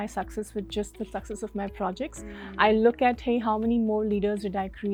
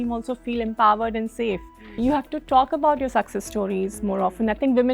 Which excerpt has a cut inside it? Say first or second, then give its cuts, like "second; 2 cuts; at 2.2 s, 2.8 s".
second; 1 cut; at 2.0 s